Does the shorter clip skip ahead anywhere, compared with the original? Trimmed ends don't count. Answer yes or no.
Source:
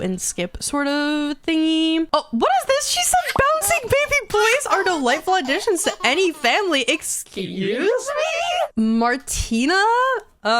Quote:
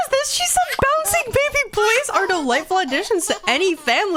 no